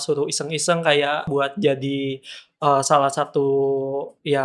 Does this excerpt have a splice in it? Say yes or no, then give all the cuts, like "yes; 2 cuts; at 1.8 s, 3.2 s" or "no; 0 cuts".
yes; 1 cut; at 1.3 s